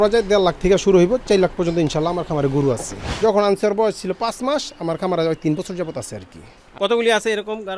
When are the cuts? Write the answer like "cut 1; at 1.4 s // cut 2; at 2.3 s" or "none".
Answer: cut 1; at 3.0 s